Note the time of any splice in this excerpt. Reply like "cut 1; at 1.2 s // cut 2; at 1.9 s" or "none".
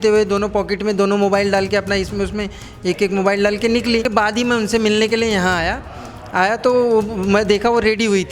cut 1; at 4.1 s